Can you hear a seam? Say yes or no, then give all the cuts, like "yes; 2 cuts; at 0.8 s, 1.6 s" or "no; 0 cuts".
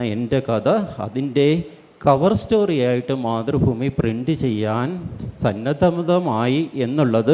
no; 0 cuts